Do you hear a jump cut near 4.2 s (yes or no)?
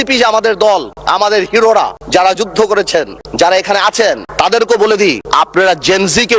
yes